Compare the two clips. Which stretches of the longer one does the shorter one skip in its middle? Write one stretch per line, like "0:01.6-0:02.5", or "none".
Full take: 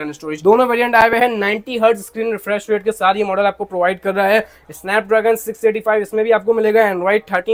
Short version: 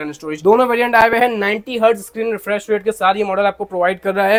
none